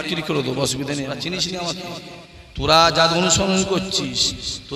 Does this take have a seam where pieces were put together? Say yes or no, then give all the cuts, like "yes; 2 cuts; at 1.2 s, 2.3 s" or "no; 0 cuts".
yes; 1 cut; at 1.2 s